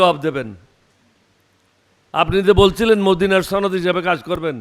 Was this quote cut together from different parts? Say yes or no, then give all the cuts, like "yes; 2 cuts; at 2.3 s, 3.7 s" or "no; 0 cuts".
no; 0 cuts